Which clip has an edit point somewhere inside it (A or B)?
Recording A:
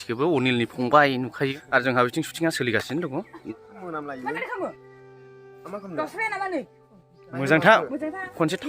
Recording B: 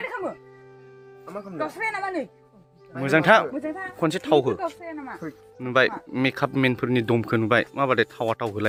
A